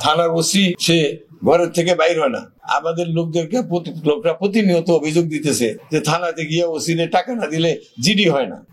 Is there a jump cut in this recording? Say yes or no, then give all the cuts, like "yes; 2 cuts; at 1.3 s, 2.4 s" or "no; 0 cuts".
no; 0 cuts